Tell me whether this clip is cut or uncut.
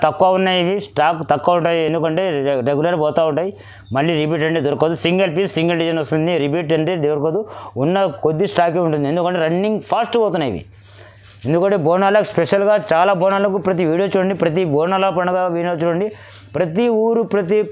uncut